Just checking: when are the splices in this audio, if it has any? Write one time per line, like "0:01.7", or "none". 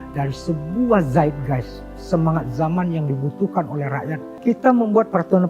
0:04.3